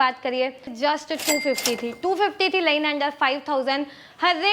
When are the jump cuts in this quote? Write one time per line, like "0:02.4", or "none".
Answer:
0:01.0